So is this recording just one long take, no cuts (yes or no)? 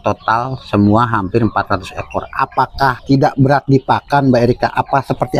no